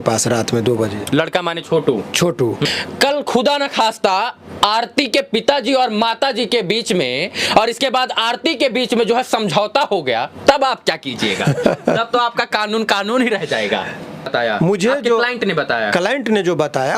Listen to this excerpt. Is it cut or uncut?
cut